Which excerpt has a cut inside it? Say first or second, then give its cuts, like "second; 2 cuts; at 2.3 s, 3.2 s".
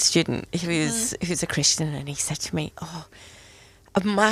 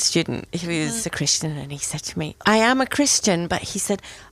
second; 2 cuts; at 1.0 s, 2.4 s